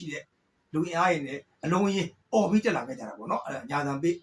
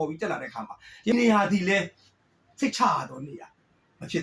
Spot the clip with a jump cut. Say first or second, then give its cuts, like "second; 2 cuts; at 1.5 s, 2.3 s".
second; 1 cut; at 1.1 s